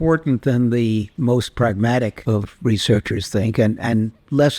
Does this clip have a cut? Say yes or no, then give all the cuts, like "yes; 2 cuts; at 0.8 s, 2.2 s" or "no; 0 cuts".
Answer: yes; 2 cuts; at 1.1 s, 2.2 s